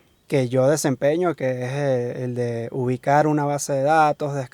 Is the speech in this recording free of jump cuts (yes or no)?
yes